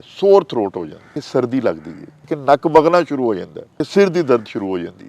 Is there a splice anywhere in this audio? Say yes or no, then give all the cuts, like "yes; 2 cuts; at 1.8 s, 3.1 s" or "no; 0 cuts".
yes; 3 cuts; at 1.1 s, 2.3 s, 3.8 s